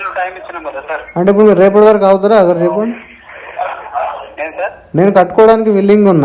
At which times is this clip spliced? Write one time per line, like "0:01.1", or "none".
0:04.8